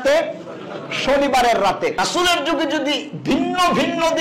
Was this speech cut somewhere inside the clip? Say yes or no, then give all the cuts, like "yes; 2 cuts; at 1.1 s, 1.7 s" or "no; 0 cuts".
yes; 1 cut; at 2.0 s